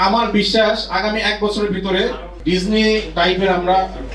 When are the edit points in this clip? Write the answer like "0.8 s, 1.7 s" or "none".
2.3 s, 3.1 s